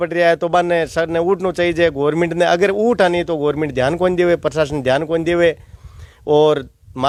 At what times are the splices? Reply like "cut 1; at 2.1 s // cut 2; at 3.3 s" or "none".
none